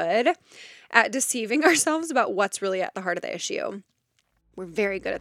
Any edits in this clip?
no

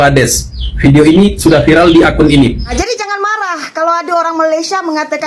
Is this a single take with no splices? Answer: no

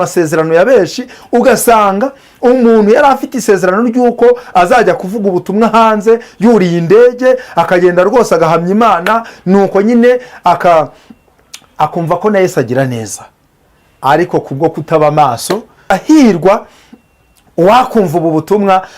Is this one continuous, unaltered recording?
no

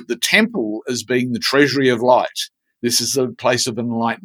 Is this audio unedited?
yes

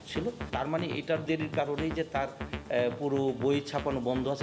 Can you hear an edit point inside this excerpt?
no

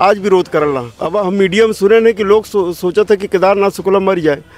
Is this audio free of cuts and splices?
no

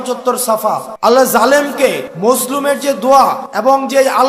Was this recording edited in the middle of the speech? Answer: yes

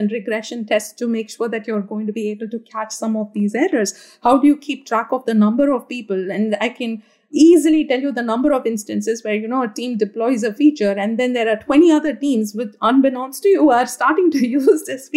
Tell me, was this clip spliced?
no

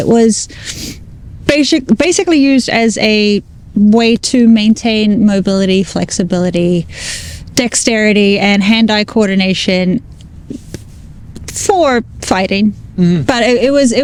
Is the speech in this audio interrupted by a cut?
no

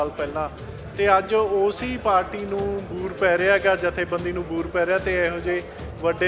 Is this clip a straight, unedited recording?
yes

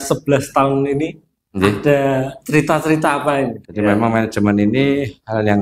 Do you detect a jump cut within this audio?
yes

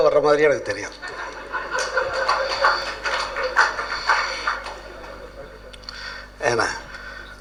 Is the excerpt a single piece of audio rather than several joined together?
yes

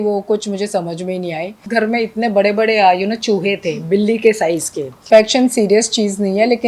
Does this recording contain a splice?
yes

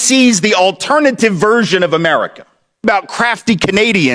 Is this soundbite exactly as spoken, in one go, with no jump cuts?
no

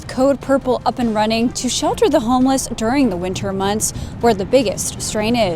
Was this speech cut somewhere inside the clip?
no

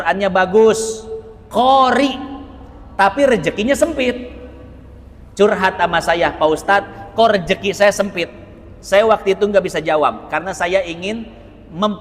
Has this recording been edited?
no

